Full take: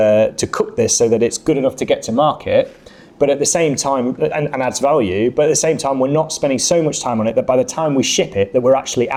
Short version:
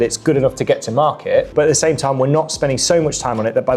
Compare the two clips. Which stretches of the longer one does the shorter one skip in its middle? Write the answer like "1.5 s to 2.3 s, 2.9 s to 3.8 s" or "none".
2.7 s to 5.3 s